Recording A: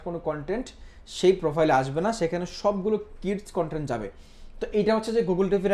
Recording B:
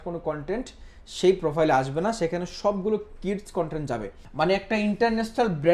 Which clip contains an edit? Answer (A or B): B